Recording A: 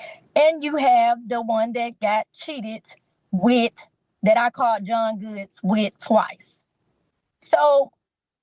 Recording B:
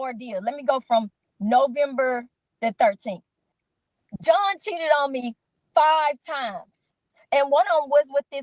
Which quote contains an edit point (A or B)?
B